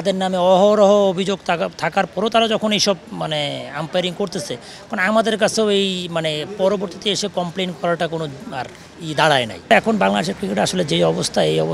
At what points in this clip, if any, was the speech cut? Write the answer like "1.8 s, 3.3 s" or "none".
9.7 s

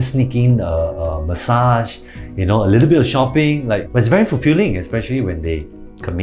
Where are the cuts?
3.7 s

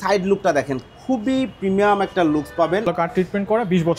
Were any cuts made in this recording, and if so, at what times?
2.9 s

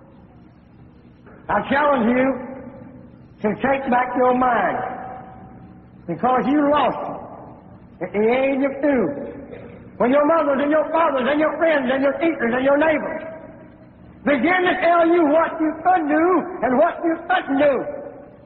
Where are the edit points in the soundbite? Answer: 1.3 s

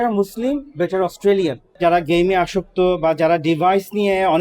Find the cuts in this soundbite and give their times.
1.7 s

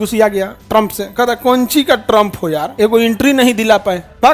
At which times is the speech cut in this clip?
2.7 s

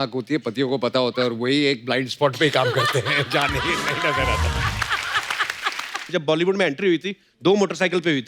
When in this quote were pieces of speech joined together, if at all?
6.1 s

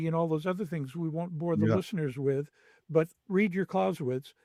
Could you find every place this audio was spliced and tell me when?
none

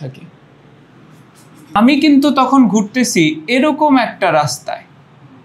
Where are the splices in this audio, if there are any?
1.8 s

